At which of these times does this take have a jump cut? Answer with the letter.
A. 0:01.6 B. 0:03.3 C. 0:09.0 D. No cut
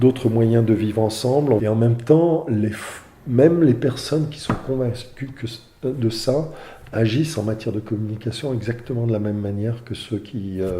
A